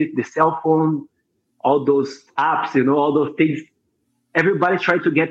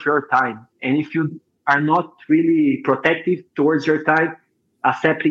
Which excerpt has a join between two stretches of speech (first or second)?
first